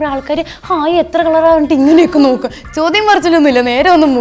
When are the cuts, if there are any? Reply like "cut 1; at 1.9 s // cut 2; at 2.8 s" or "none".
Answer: none